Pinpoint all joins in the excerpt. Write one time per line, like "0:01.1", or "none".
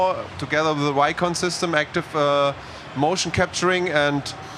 none